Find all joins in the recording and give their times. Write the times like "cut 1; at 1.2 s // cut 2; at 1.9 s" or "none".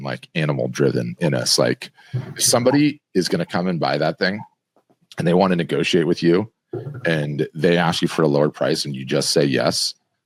none